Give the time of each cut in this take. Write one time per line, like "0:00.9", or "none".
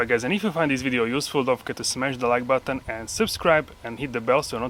none

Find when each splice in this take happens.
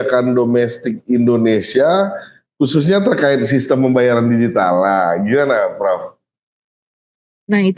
none

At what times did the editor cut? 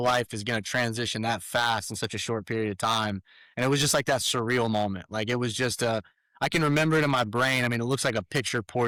none

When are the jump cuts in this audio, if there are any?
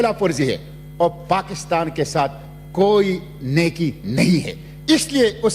none

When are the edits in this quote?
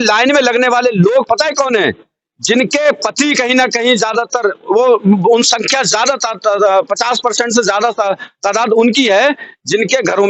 none

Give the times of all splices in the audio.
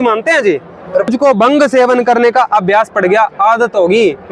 0:01.1

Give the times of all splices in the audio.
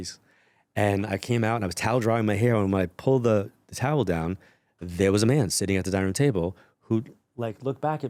none

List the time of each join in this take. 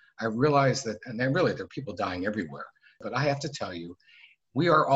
0:03.0

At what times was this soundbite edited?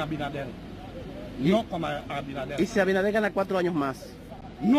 none

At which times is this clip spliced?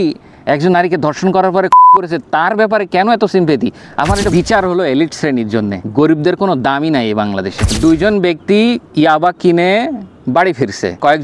0:04.2
0:07.6

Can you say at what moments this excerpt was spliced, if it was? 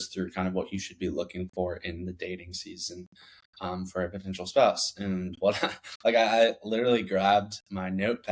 none

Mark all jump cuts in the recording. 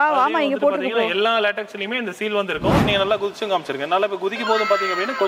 0:02.8

